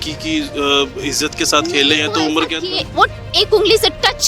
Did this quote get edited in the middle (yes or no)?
no